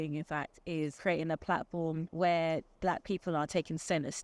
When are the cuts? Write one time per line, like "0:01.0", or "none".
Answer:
0:00.9
0:02.1
0:02.7